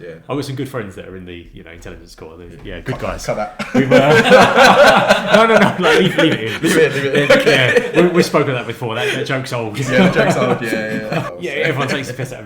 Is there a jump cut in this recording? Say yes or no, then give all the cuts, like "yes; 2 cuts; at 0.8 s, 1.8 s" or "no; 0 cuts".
yes; 1 cut; at 11.3 s